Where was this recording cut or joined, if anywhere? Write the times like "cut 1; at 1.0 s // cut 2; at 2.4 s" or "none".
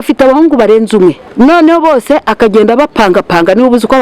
cut 1; at 1.2 s